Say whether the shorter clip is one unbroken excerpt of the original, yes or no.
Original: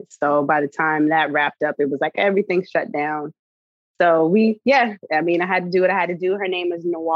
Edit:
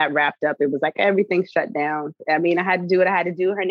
no